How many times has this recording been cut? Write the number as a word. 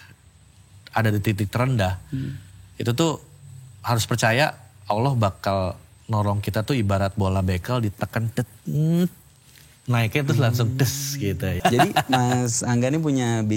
one